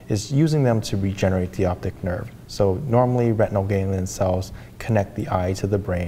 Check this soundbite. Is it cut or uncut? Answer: uncut